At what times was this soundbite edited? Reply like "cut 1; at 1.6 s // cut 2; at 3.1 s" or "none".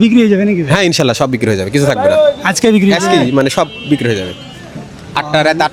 none